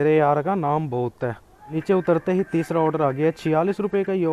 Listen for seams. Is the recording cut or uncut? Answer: cut